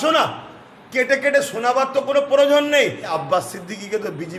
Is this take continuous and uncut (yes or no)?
no